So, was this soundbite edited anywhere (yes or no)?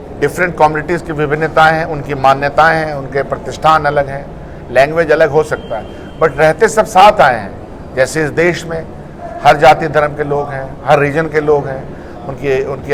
no